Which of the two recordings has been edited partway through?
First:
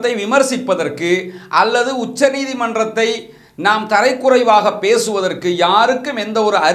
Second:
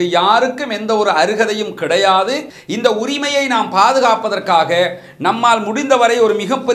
second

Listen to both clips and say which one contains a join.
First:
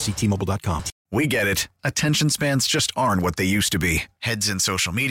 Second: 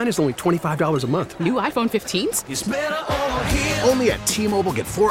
first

